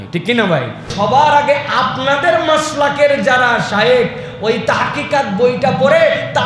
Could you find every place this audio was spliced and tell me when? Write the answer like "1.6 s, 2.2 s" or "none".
0.9 s